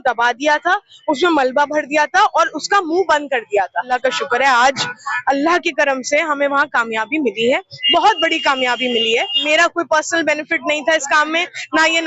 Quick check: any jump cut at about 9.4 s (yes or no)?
yes